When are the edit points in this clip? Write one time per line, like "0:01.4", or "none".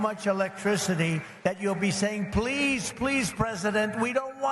0:01.3